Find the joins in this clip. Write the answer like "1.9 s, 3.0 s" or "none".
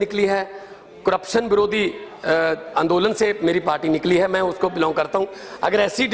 4.2 s